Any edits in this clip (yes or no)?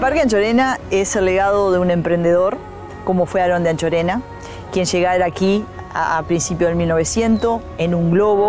no